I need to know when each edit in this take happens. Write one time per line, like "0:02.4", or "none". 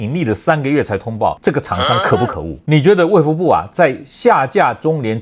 0:02.5